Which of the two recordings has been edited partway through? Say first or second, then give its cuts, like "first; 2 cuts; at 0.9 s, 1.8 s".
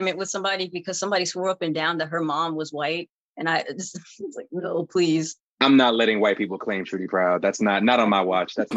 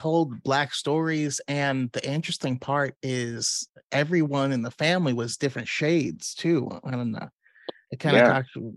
first; 1 cut; at 5.4 s